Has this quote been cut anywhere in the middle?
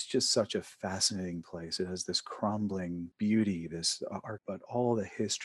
yes; 1 cut; at 4.3 s

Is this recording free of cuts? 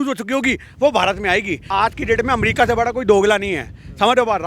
no; 1 cut; at 1.6 s

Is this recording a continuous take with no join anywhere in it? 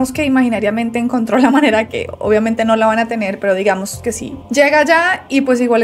yes; 0 cuts

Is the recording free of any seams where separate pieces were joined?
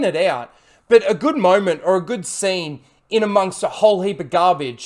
yes; 0 cuts

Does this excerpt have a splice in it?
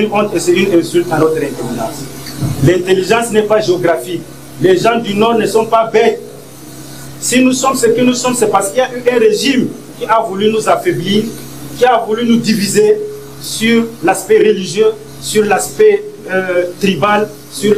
no; 0 cuts

